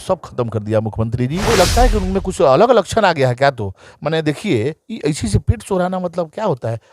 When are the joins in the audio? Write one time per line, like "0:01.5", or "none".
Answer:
0:01.4